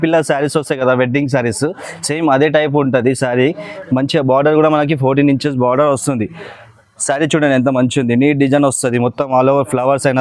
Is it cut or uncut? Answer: uncut